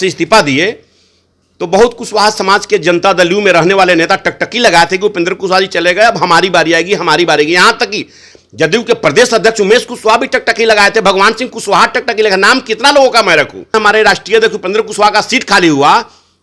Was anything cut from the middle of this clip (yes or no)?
yes